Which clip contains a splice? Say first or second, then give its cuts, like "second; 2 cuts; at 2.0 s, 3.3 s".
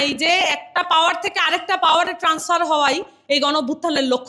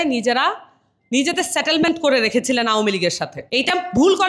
second; 1 cut; at 3.3 s